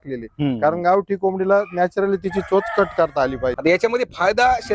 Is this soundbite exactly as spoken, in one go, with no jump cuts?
no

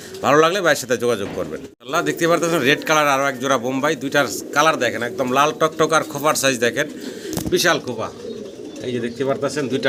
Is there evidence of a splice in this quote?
no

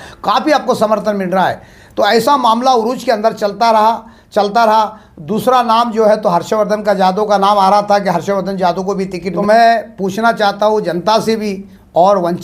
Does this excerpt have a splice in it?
yes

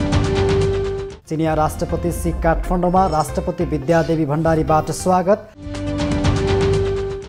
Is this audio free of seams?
no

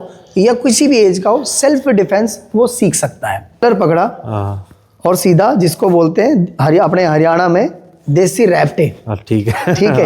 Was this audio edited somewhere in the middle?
yes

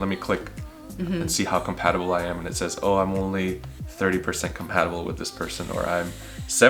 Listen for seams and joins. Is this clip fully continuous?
yes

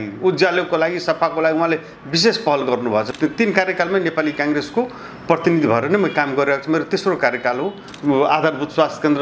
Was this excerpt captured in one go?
no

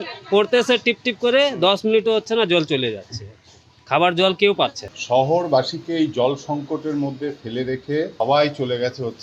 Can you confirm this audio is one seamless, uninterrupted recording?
no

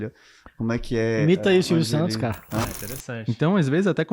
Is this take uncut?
no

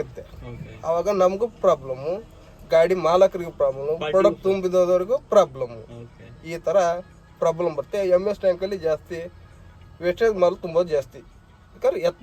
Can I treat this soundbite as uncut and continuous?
yes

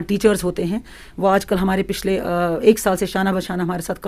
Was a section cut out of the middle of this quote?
no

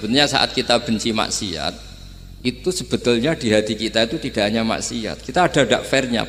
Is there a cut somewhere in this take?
no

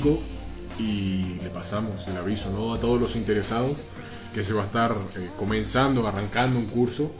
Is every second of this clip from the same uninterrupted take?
no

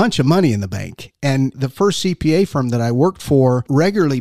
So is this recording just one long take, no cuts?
no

